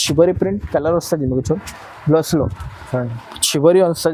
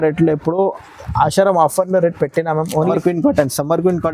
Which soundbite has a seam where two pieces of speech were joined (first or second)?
second